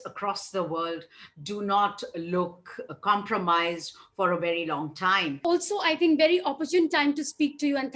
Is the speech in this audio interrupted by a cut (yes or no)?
yes